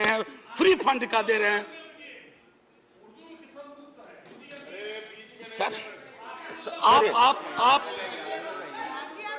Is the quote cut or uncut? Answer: uncut